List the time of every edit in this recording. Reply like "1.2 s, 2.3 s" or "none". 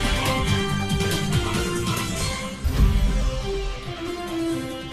2.6 s